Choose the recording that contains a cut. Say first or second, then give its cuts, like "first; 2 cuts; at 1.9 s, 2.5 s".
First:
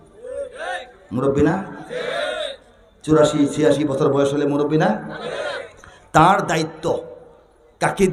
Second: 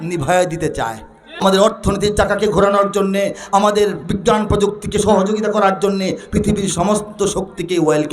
second; 1 cut; at 1.4 s